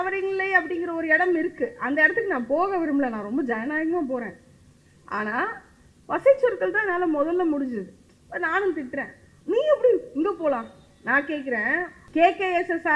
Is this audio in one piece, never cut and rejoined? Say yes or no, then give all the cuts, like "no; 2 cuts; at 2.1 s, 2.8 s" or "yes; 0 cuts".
no; 1 cut; at 12.0 s